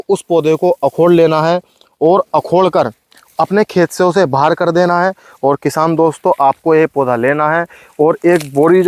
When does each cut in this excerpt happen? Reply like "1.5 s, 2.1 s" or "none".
none